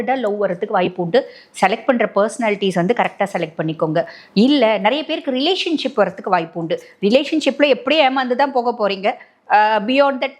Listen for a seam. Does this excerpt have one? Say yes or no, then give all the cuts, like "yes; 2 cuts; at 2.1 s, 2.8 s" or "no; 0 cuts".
no; 0 cuts